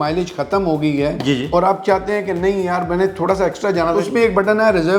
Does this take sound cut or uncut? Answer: cut